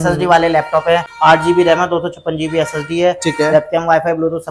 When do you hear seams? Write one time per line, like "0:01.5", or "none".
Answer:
0:01.1